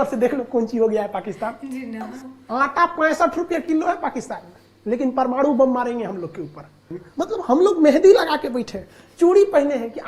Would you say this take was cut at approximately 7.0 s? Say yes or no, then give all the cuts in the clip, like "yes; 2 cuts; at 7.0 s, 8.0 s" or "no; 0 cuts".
yes; 2 cuts; at 2.2 s, 7.0 s